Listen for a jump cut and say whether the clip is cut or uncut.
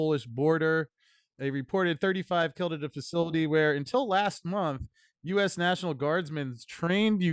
cut